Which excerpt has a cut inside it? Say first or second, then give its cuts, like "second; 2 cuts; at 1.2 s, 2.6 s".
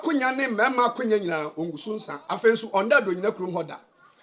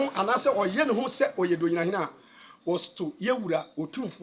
first; 1 cut; at 2.1 s